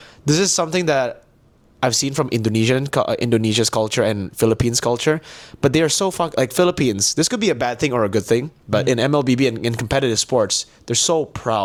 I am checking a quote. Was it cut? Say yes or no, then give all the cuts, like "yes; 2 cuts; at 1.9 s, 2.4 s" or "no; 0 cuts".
no; 0 cuts